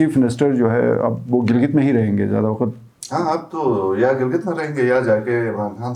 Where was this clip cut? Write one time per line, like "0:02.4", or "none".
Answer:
none